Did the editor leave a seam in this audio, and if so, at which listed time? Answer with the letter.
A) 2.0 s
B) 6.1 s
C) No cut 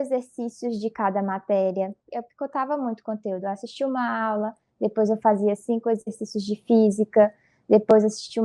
A